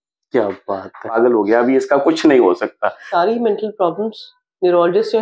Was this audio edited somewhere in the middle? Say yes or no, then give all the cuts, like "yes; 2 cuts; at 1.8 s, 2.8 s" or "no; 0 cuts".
yes; 2 cuts; at 1.1 s, 3.0 s